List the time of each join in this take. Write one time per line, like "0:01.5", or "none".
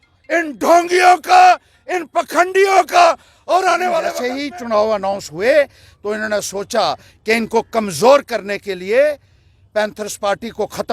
0:04.2

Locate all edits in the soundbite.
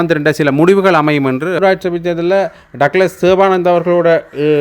0:01.6

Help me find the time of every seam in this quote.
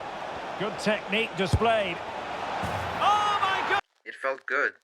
0:03.8

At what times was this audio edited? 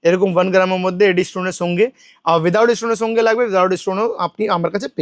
none

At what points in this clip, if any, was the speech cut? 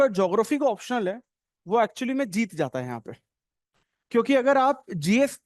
none

